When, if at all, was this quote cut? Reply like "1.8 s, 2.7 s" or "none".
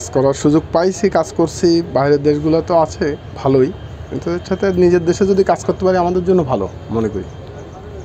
none